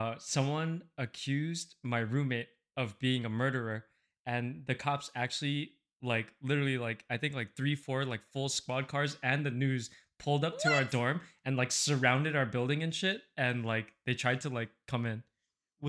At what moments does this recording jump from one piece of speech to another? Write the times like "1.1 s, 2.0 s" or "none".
none